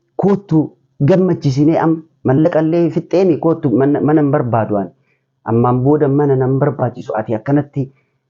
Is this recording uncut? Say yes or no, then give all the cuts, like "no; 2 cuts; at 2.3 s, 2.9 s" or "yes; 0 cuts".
yes; 0 cuts